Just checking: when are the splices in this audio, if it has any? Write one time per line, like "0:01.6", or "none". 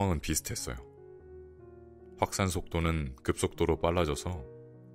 none